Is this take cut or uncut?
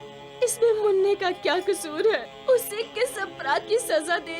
cut